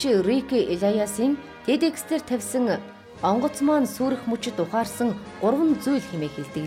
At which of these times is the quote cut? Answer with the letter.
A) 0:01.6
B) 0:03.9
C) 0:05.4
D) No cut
D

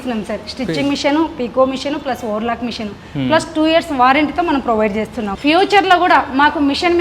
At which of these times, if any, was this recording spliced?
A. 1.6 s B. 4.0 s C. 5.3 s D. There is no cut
C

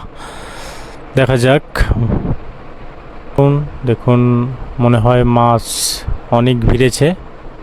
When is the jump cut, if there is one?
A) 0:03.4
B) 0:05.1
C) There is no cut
A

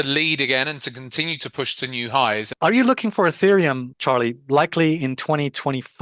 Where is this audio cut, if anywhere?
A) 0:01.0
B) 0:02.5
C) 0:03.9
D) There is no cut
B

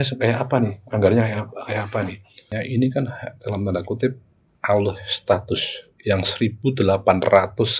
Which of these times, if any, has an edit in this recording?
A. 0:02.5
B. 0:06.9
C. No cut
A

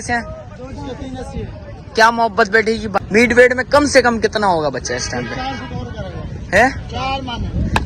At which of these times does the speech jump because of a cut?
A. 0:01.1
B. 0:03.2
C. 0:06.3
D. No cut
B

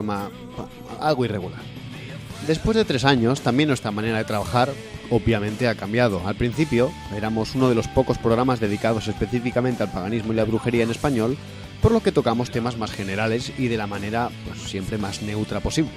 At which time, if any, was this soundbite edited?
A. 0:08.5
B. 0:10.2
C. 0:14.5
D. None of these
C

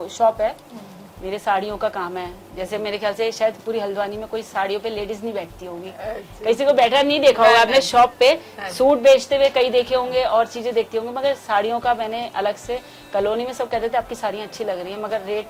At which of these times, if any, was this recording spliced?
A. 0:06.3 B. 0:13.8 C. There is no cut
C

